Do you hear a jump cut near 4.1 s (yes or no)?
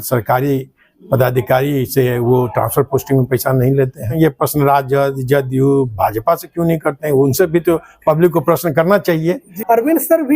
yes